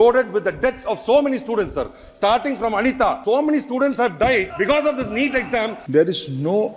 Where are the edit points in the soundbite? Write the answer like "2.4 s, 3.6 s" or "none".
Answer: 3.2 s, 4.5 s, 5.8 s